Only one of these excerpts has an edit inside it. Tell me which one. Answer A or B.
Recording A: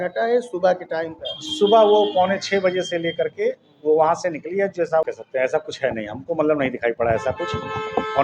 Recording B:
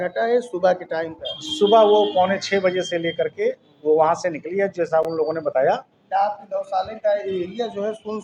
A